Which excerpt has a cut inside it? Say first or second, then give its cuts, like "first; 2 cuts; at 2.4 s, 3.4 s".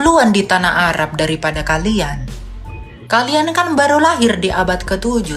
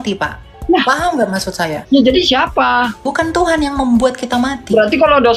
second; 2 cuts; at 1.8 s, 3.0 s